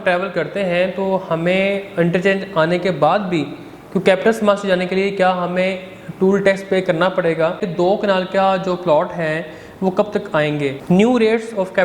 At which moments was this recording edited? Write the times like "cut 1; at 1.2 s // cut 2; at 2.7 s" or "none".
cut 1; at 7.7 s // cut 2; at 10.8 s

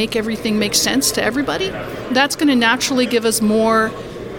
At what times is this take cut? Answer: cut 1; at 1.9 s

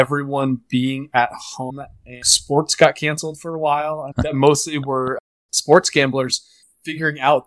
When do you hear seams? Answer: cut 1; at 2.3 s // cut 2; at 4.2 s

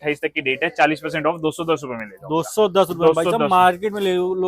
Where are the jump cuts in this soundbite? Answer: none

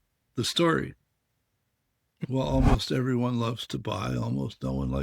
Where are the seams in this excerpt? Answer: cut 1; at 2.1 s

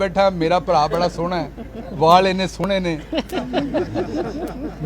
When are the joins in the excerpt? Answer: none

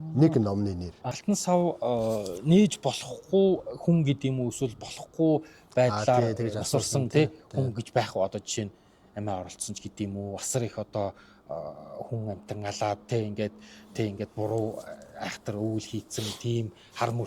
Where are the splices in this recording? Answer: cut 1; at 1.1 s

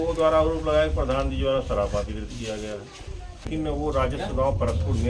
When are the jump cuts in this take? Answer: cut 1; at 3.5 s

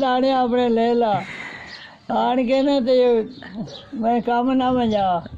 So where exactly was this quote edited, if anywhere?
none

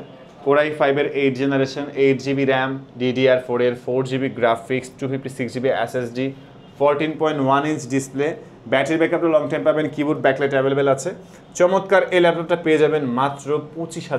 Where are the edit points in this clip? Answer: none

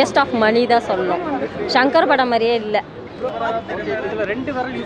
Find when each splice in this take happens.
cut 1; at 3.3 s

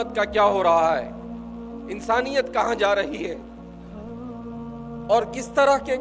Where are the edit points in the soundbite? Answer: cut 1; at 3.4 s // cut 2; at 4.8 s

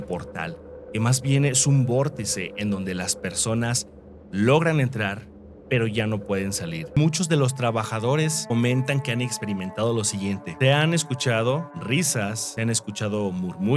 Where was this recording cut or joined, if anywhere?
cut 1; at 7.0 s

